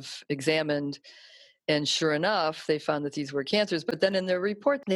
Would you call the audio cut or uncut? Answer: uncut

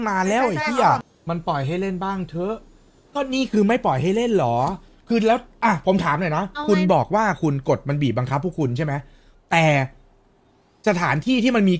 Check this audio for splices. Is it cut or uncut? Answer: cut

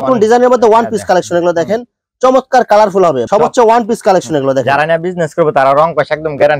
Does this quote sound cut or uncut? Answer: cut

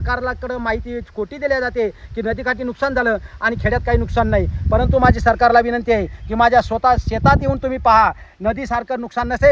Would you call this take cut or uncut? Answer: uncut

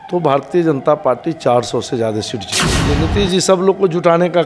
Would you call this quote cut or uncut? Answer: cut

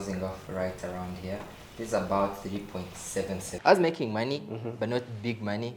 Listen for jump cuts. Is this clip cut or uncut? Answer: cut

